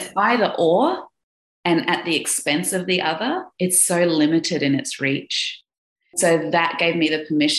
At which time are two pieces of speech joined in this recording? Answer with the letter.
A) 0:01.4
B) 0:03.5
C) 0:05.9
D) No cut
C